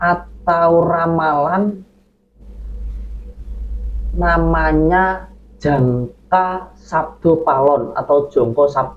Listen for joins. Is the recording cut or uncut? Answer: uncut